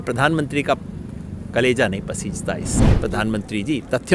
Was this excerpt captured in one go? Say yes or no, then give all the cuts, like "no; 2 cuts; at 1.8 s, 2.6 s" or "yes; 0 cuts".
no; 1 cut; at 2.9 s